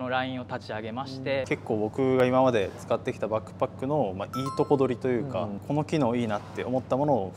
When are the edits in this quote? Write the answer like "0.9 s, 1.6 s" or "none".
1.5 s, 5.6 s